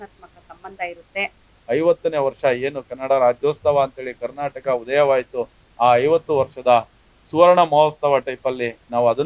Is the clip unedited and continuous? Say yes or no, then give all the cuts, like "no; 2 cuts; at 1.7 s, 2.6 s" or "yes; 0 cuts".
no; 1 cut; at 1.5 s